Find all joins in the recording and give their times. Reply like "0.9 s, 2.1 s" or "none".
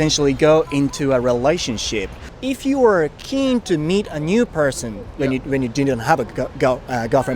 2.2 s